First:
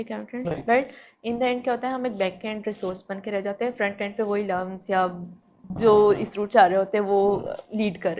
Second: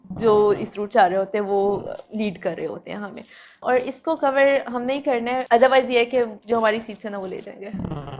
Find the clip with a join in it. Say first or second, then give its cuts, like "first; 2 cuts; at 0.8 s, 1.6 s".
second; 3 cuts; at 3.6 s, 5.4 s, 6.4 s